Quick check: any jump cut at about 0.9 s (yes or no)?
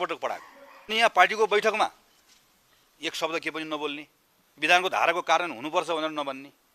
yes